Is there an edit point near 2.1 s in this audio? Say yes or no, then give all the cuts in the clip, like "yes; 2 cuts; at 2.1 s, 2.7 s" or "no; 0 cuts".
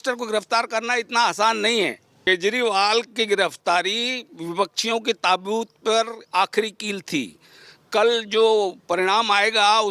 yes; 1 cut; at 2.1 s